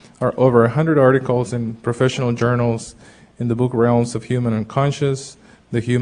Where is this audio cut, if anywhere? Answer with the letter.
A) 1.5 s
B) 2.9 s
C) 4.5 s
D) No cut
C